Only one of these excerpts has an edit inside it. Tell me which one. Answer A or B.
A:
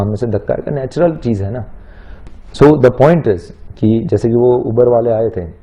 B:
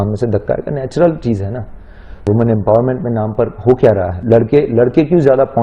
B